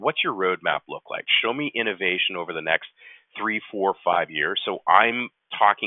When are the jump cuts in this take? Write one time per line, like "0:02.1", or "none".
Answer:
none